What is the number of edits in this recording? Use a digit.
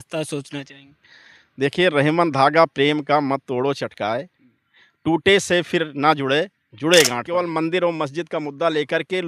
1